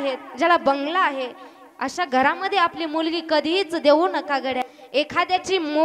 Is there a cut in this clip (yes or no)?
yes